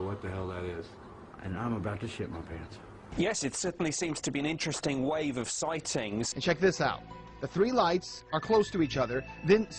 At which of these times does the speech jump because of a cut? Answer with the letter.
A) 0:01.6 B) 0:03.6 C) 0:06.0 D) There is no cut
D